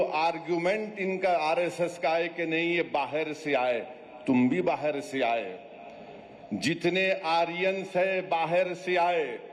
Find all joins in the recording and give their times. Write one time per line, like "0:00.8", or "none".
none